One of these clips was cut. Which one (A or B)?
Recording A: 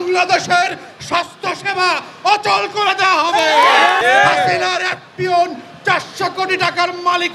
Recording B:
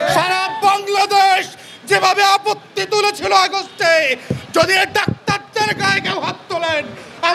A